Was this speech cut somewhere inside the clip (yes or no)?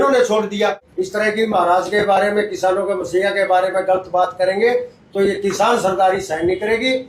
yes